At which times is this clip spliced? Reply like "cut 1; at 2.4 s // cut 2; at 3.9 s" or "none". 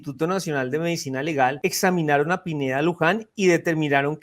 cut 1; at 1.6 s